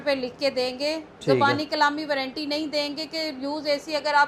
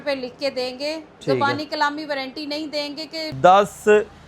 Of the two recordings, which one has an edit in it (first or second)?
second